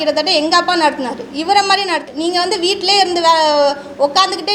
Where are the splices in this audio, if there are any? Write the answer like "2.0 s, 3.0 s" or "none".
2.1 s